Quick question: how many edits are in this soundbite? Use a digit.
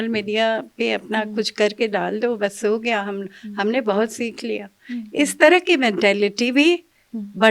0